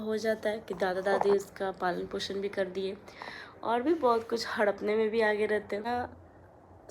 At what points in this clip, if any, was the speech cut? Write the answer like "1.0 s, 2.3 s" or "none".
5.8 s